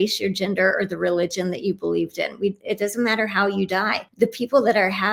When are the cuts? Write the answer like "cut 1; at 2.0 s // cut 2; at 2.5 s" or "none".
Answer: cut 1; at 4.0 s